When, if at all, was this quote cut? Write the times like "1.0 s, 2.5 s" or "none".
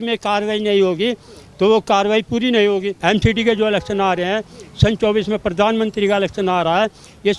2.9 s